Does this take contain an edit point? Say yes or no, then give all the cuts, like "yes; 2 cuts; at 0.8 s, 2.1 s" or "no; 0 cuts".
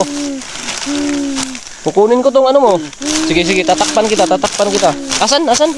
no; 0 cuts